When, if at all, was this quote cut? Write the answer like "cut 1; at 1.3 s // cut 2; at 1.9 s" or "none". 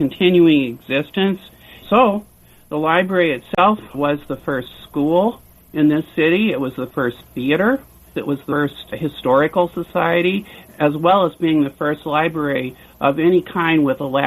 cut 1; at 1.7 s // cut 2; at 8.2 s